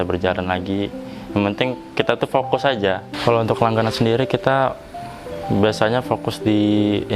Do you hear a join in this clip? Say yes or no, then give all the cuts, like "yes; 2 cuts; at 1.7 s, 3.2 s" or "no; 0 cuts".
yes; 1 cut; at 3.1 s